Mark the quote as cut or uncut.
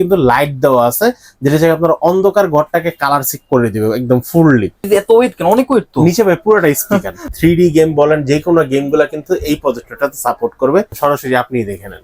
cut